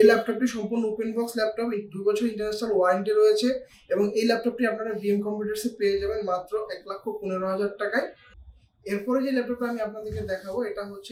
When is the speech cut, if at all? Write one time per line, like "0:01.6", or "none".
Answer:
none